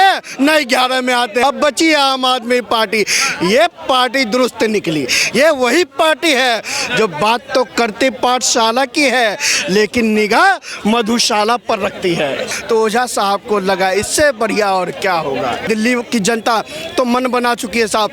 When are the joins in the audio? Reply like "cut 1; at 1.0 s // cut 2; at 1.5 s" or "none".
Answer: cut 1; at 1.4 s // cut 2; at 12.5 s // cut 3; at 15.6 s